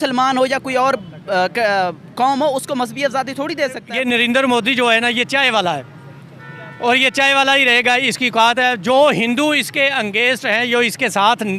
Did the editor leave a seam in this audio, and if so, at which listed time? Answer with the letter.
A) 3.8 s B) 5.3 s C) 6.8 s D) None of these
A